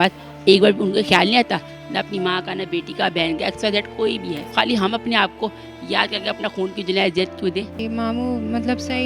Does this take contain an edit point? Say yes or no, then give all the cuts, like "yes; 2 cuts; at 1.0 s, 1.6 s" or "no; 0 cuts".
yes; 2 cuts; at 4.4 s, 7.7 s